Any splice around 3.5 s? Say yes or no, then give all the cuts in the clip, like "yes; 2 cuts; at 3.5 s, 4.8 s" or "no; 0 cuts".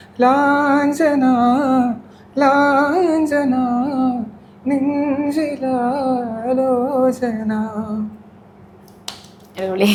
no; 0 cuts